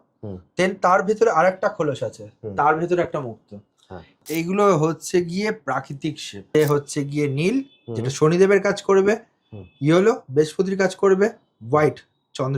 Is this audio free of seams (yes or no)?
no